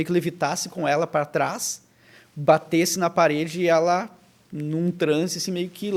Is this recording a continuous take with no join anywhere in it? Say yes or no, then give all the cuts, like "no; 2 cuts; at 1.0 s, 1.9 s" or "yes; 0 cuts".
yes; 0 cuts